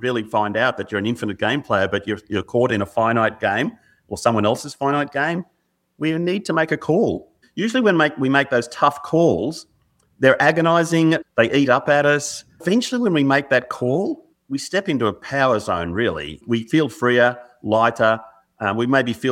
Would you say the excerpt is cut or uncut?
cut